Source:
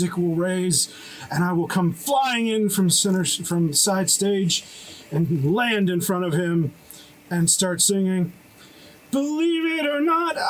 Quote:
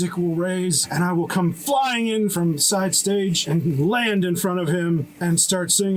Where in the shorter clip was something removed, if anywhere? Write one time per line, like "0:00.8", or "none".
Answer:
0:00.8
0:02.3
0:03.4
0:05.1